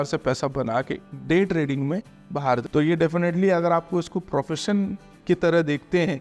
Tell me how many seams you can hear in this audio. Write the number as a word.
one